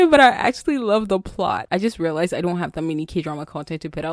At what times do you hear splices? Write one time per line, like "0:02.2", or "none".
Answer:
0:01.6